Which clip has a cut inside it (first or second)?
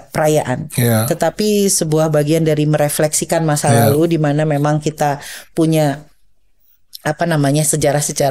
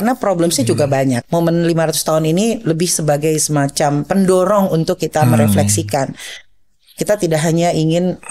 second